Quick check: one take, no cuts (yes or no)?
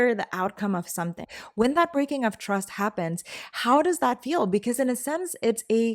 no